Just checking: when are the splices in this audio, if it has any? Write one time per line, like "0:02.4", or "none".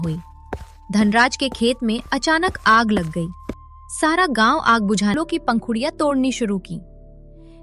0:05.1